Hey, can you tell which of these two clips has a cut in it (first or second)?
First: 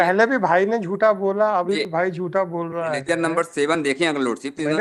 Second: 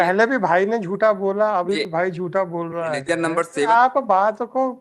second